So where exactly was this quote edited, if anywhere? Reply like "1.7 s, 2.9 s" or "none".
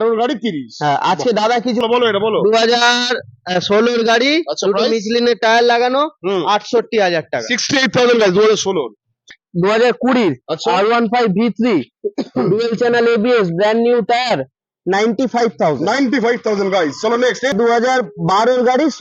1.8 s, 9.2 s, 17.5 s